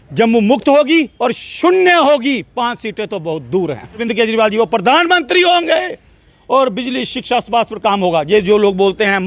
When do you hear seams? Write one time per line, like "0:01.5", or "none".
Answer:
none